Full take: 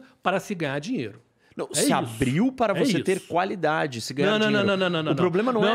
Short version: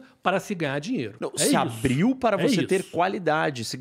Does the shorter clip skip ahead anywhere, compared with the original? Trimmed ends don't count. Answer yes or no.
yes